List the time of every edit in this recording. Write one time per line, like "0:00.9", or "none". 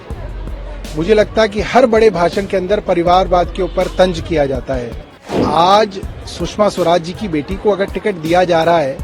0:05.4